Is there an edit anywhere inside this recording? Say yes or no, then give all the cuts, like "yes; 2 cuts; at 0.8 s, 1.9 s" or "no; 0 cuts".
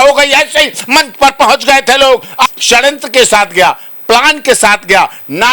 yes; 1 cut; at 2.5 s